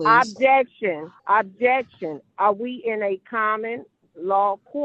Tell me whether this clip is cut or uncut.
cut